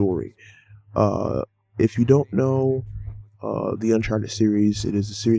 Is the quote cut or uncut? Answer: cut